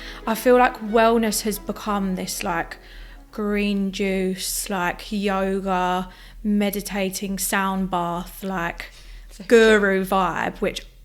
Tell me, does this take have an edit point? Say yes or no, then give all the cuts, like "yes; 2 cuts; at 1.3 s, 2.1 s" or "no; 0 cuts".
no; 0 cuts